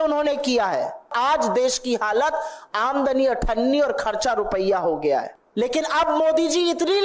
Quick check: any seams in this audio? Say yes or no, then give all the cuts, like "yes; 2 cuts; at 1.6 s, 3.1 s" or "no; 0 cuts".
yes; 2 cuts; at 1.1 s, 5.4 s